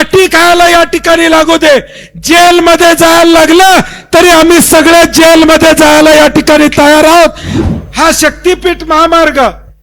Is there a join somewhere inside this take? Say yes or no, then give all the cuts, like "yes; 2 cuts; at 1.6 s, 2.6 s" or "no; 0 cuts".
yes; 1 cut; at 7.5 s